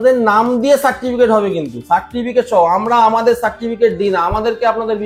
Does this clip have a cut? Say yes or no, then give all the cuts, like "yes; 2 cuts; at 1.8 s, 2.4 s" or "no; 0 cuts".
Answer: no; 0 cuts